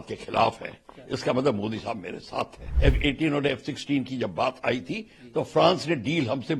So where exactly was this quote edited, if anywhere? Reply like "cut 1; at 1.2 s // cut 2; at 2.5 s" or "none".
cut 1; at 2.7 s